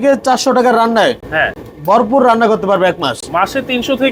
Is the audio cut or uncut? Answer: uncut